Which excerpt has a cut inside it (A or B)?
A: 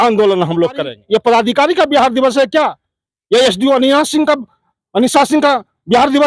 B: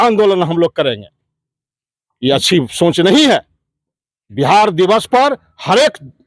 A